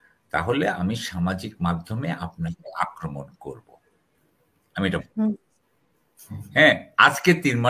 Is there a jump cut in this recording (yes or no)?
no